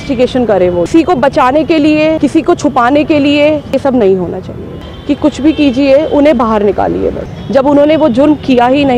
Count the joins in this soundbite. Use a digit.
5